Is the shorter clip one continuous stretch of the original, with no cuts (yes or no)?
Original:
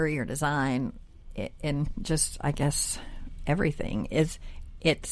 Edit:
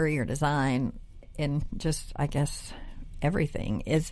no